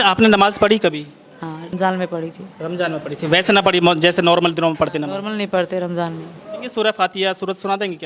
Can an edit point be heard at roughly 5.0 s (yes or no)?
no